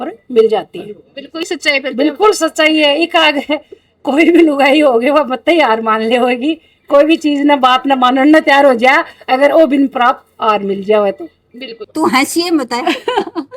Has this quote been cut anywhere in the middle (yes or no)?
yes